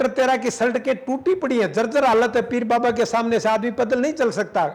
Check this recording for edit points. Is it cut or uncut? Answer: uncut